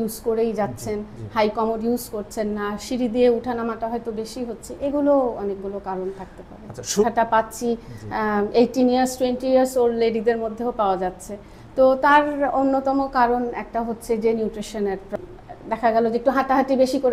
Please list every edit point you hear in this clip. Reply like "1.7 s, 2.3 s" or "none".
7.0 s, 15.1 s